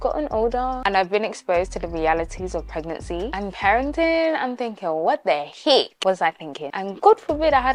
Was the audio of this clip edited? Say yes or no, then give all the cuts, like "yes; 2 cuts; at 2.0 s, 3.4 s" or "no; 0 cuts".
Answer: no; 0 cuts